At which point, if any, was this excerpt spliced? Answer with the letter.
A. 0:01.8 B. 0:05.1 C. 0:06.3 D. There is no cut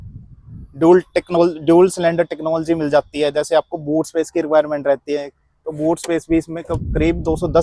D